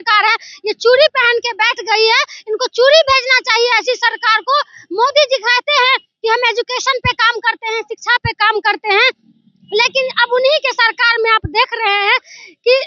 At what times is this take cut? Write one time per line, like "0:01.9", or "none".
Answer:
none